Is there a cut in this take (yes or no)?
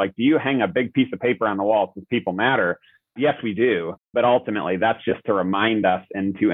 yes